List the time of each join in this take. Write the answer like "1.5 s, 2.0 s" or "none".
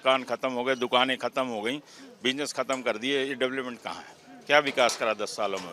none